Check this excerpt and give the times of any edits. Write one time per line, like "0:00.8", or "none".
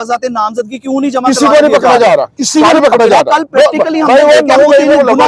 none